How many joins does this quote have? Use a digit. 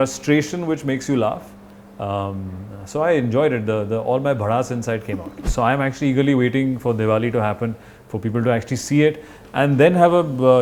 1